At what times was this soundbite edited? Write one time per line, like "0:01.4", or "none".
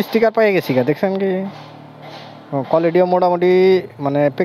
none